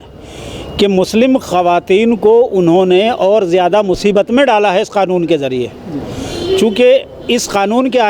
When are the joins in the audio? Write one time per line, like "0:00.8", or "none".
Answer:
none